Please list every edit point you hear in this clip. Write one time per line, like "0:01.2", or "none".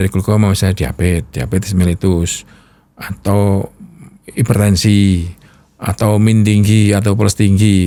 none